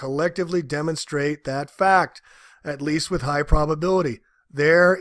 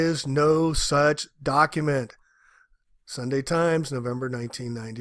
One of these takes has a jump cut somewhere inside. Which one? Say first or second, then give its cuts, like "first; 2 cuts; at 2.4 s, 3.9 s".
second; 1 cut; at 3.5 s